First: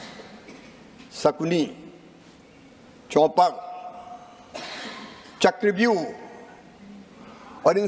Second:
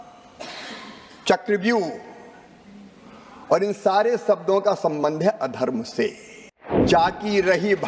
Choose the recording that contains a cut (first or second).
second